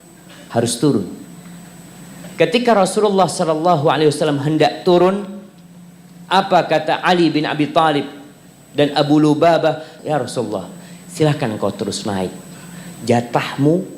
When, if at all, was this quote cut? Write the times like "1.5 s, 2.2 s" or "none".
9.9 s

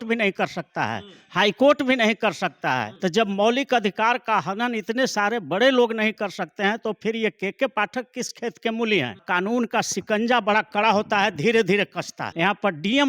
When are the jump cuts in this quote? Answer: 2.9 s, 8.3 s, 9.2 s, 12.2 s

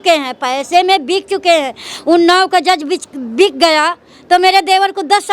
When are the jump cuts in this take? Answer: none

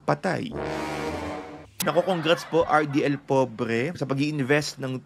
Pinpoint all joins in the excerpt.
1.7 s

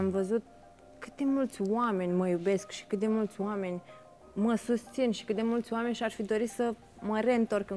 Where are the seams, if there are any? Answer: none

